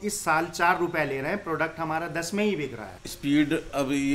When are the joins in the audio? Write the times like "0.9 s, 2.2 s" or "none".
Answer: 2.7 s